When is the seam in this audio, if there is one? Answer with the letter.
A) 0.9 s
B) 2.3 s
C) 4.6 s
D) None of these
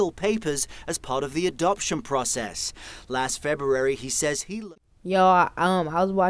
C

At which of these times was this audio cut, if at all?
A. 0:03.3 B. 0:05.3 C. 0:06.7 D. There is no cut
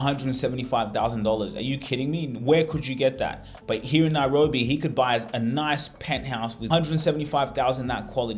C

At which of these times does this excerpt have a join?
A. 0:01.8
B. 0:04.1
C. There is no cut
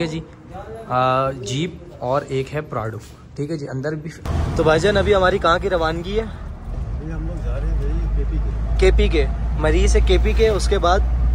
B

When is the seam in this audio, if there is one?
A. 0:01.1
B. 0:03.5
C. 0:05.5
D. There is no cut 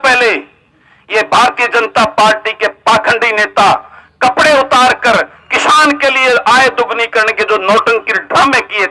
D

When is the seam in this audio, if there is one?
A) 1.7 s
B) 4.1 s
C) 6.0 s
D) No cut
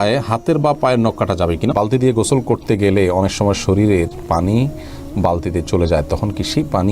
A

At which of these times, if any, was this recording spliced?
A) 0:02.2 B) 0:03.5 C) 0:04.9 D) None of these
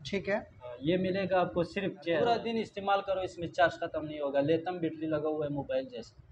A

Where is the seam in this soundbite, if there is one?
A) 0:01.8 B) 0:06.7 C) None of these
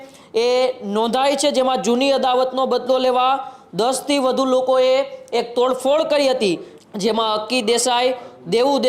B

